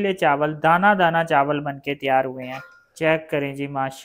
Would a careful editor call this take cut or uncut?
uncut